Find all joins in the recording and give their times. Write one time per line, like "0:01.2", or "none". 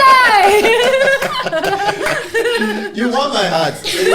none